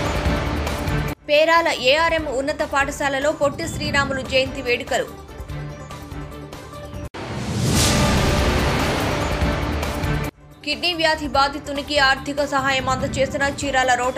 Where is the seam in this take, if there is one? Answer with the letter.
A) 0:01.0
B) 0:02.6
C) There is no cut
C